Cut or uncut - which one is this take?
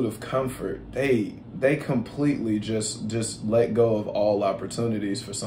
uncut